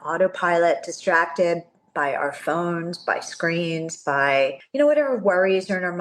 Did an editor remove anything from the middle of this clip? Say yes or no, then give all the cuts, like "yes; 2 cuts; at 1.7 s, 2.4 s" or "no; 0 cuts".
yes; 1 cut; at 4.6 s